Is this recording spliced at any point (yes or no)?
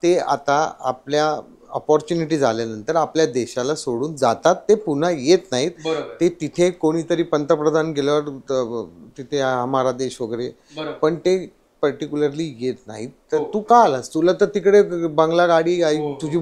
no